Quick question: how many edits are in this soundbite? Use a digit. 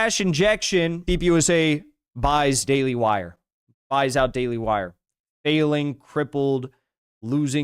1